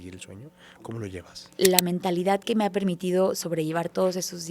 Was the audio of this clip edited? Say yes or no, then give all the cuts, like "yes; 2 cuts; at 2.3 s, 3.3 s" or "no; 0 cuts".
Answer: yes; 1 cut; at 1.4 s